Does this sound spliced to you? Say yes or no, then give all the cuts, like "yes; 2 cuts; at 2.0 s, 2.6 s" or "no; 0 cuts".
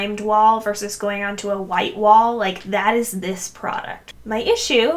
yes; 1 cut; at 4.0 s